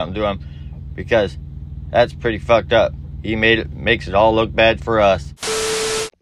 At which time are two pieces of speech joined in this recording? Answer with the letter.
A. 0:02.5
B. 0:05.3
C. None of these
B